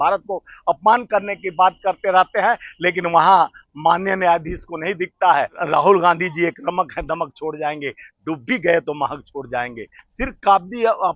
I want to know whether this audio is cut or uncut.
cut